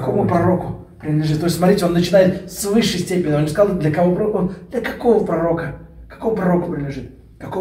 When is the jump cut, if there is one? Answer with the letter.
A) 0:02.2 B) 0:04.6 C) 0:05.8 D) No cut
D